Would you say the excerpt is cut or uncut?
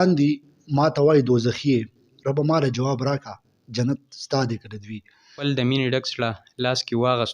cut